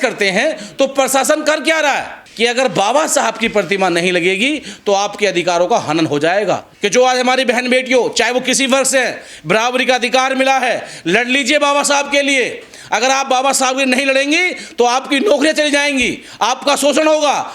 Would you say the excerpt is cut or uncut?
cut